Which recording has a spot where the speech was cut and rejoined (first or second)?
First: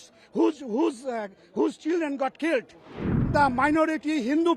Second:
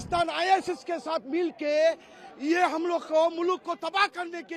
first